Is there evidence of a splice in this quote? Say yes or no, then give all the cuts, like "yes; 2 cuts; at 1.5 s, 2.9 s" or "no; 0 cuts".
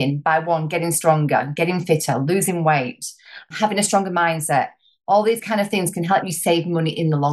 yes; 2 cuts; at 3.5 s, 6.2 s